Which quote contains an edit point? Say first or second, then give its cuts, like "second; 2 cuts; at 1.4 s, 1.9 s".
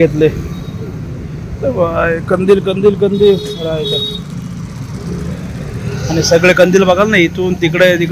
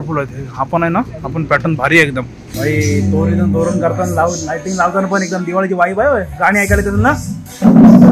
second; 1 cut; at 2.4 s